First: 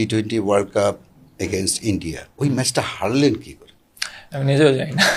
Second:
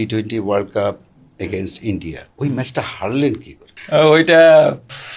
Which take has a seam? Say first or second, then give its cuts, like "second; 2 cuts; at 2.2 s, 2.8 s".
second; 1 cut; at 4.0 s